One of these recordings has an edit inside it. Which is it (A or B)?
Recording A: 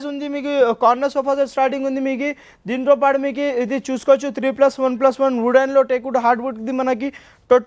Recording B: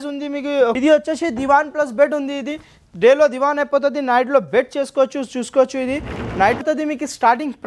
B